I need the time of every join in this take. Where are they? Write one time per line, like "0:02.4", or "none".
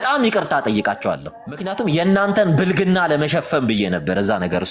0:01.7